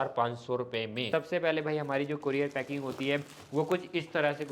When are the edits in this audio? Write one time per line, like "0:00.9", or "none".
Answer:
0:01.0

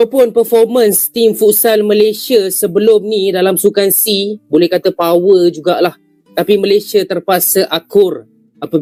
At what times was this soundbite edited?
none

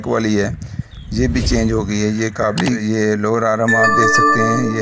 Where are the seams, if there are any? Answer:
0:02.8

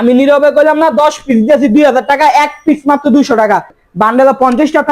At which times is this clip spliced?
0:03.8

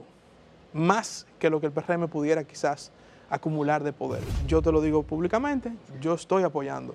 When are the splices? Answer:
0:04.2

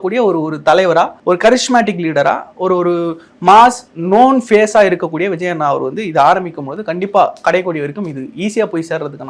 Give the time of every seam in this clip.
0:01.2

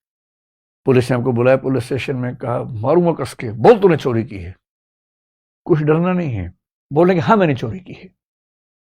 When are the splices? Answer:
none

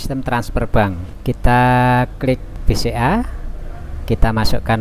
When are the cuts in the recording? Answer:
0:01.1
0:02.5

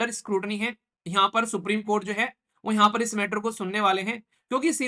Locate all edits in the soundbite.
none

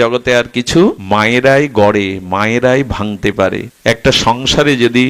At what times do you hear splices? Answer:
0:01.0
0:03.7

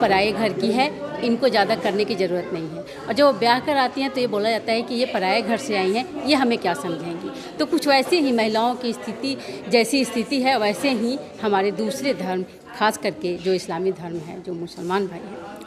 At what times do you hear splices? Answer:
none

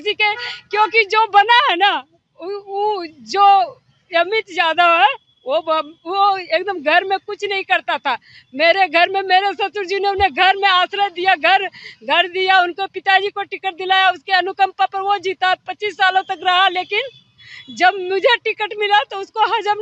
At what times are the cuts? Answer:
none

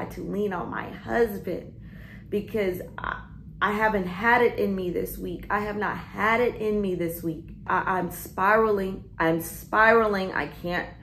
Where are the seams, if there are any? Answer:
0:07.6

